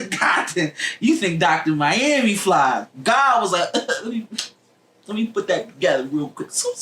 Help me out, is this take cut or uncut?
uncut